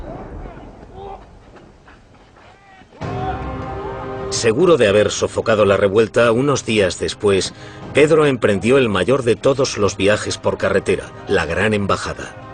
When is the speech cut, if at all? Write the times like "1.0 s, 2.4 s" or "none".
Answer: 4.0 s